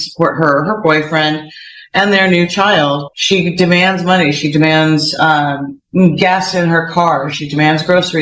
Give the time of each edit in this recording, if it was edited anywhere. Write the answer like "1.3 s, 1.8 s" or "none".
3.1 s